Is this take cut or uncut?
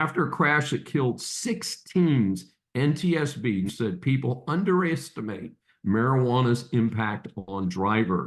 cut